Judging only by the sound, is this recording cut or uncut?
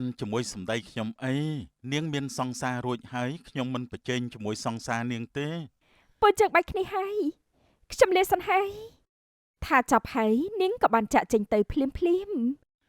uncut